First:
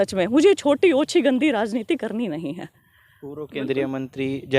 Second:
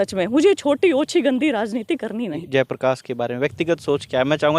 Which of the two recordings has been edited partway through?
second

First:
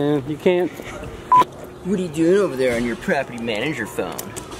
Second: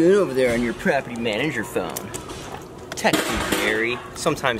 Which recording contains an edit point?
first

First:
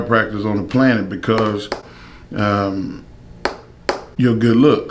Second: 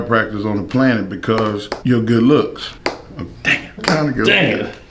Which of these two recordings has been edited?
second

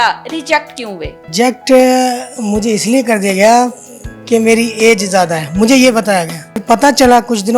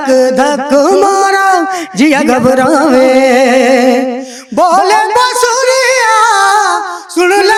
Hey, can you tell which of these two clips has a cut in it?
first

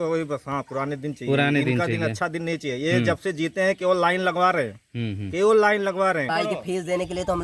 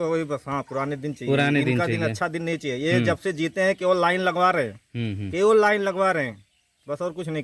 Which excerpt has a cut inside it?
first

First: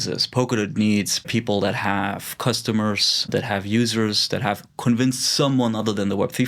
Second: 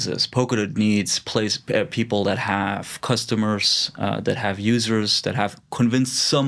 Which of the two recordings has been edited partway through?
first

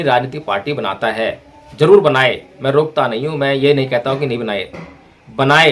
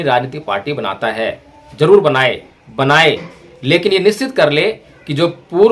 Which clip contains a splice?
second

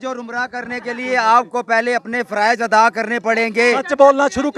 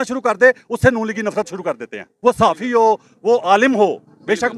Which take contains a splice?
second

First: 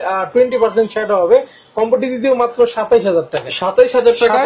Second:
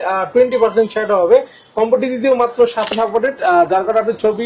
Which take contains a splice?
second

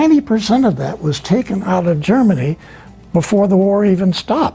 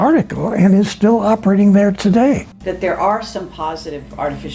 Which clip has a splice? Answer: second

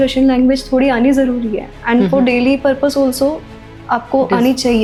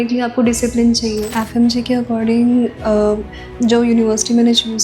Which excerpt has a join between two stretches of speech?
second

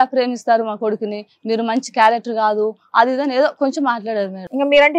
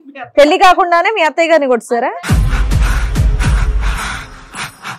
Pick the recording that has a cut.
second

